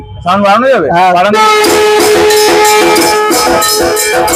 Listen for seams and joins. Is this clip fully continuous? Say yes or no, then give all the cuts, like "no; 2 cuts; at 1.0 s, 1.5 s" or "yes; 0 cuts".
yes; 0 cuts